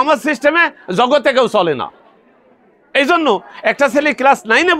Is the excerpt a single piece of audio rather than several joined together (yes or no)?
yes